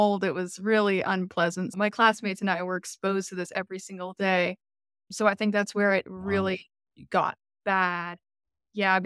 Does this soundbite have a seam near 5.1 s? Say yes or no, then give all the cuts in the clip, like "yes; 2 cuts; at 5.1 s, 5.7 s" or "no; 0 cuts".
yes; 2 cuts; at 1.7 s, 5.1 s